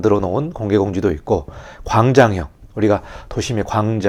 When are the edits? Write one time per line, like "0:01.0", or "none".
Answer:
none